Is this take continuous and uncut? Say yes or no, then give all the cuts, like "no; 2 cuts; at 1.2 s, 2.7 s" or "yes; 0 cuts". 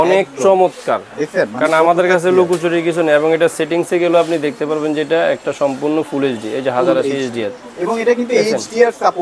yes; 0 cuts